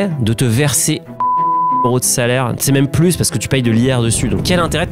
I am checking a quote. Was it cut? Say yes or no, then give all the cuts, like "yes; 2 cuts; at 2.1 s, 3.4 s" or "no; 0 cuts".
no; 0 cuts